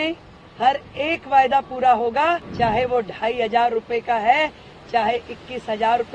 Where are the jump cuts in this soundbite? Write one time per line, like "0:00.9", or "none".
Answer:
0:02.5

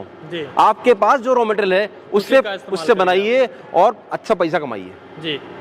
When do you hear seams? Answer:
none

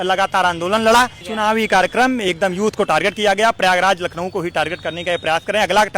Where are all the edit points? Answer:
0:01.3

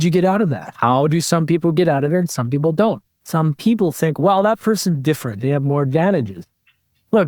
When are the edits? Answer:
0:03.2

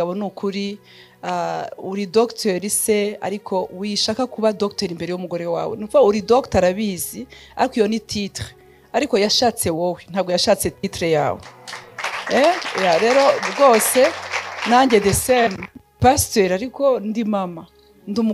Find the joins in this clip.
none

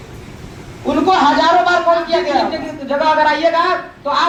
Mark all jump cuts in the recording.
none

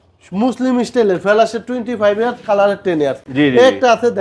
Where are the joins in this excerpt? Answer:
none

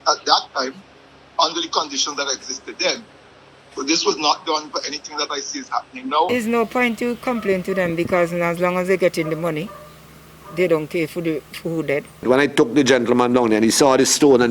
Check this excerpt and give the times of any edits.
0:06.3
0:12.2

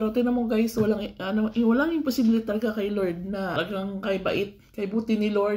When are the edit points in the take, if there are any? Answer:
0:03.5

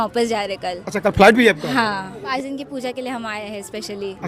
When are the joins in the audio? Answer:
0:02.2

